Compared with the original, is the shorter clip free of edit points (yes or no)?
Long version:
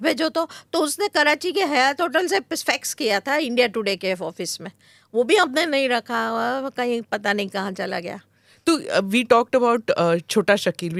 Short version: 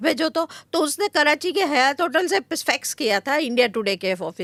yes